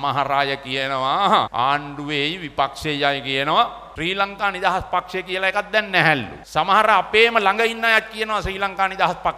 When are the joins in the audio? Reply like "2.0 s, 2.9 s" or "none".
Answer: 1.5 s, 3.8 s, 6.4 s